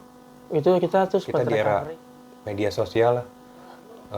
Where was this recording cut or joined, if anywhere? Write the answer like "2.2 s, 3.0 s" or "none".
1.4 s